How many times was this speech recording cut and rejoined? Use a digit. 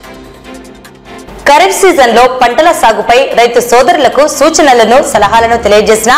1